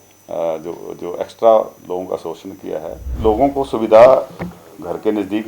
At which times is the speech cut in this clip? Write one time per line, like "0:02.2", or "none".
0:03.1